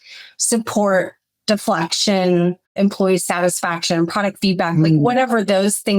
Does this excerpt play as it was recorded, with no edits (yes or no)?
yes